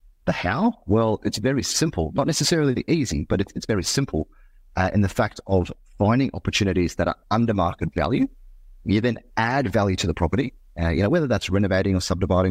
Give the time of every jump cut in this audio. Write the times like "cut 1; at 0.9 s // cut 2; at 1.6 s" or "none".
none

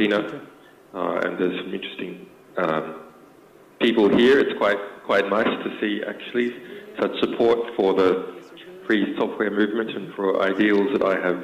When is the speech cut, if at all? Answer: cut 1; at 8.8 s

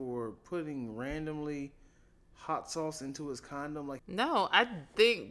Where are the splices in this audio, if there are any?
cut 1; at 4.0 s

